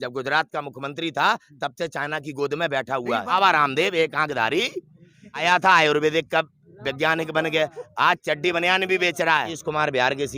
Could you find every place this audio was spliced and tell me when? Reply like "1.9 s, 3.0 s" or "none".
3.3 s, 5.4 s, 9.5 s